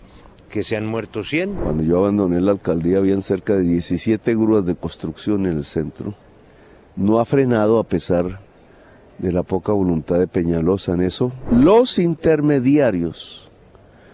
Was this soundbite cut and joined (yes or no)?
yes